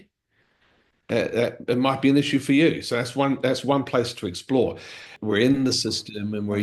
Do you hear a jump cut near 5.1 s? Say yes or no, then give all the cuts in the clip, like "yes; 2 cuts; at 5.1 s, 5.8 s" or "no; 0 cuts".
yes; 1 cut; at 5.1 s